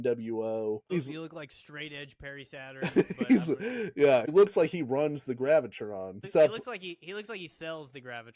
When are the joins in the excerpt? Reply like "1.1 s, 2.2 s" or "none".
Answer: 0.8 s, 4.3 s, 6.2 s

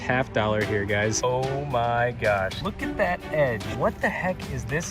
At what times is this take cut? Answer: 1.2 s, 2.6 s, 3.7 s

